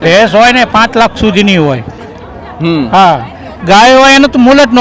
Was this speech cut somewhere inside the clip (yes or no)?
no